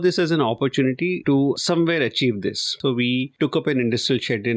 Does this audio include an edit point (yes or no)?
yes